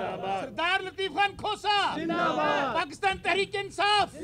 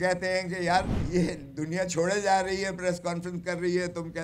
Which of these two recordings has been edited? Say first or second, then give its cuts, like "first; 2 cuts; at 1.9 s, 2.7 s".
second; 1 cut; at 1.0 s